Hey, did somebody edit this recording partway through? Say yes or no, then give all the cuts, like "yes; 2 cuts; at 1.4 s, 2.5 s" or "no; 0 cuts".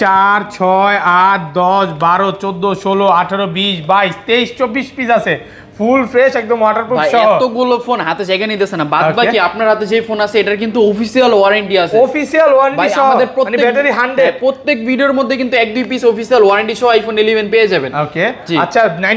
no; 0 cuts